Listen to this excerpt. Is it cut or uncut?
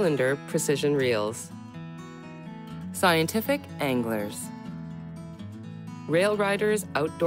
cut